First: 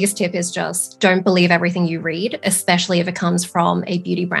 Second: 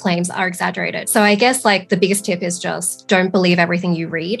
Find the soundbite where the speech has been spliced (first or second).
second